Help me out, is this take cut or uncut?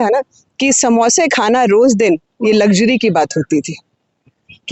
uncut